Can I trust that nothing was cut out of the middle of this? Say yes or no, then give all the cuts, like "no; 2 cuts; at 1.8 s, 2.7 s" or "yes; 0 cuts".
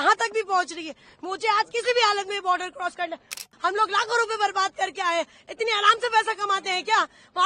no; 1 cut; at 3.4 s